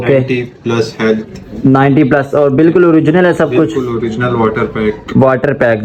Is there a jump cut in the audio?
no; 0 cuts

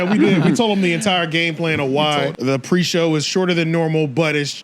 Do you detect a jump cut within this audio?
yes; 1 cut; at 2.4 s

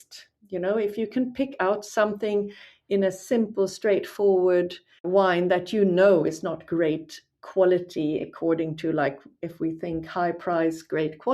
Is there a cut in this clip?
yes; 1 cut; at 5.0 s

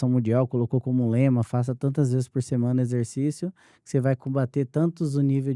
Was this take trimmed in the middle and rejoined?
no; 0 cuts

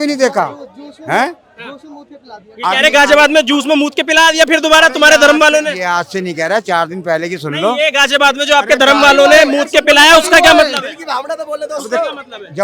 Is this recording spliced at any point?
no; 0 cuts

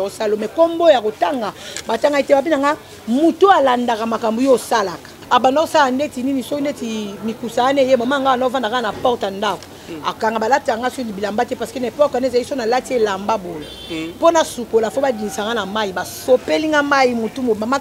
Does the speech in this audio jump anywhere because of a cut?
yes; 1 cut; at 5.1 s

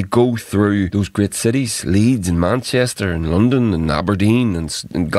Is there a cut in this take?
yes; 1 cut; at 0.9 s

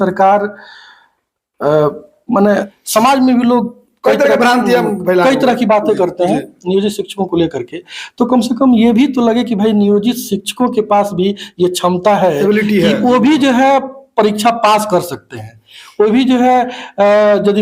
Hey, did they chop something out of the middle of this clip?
yes; 1 cut; at 2.7 s

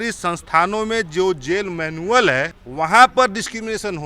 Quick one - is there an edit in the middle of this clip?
yes; 1 cut; at 2.6 s

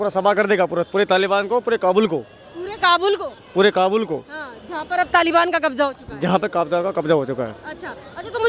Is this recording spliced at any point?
no; 0 cuts

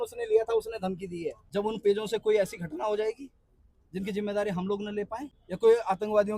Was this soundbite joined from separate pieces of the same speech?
yes; 2 cuts; at 1.4 s, 5.4 s

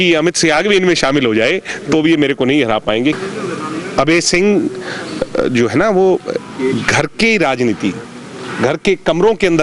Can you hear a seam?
yes; 1 cut; at 3.2 s

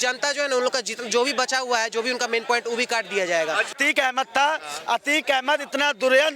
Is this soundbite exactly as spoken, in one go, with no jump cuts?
no; 1 cut; at 3.7 s

